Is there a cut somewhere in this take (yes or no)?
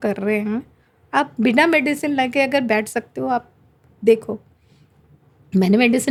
no